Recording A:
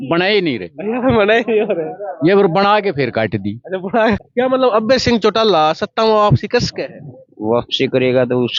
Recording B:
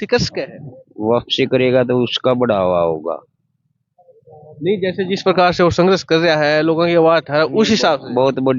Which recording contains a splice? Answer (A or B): A